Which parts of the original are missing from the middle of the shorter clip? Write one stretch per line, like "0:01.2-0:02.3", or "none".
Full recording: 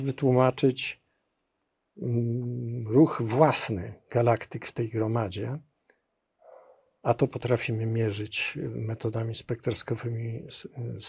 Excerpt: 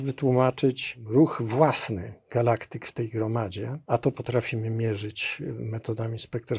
0:00.9-0:02.7
0:05.6-0:06.9